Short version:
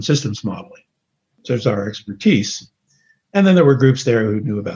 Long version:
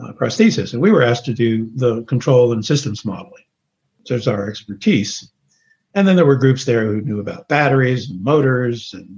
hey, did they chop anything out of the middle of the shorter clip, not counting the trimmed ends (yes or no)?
no